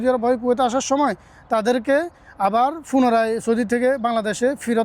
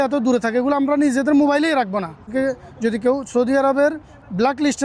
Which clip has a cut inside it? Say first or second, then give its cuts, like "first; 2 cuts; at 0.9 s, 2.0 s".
second; 1 cut; at 2.3 s